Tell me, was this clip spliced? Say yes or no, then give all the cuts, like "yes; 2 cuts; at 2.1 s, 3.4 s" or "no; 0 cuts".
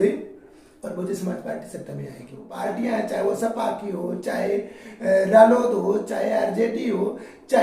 yes; 1 cut; at 2.4 s